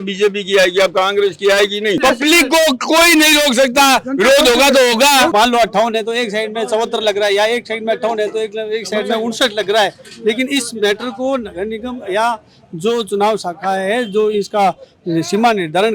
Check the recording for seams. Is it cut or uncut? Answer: cut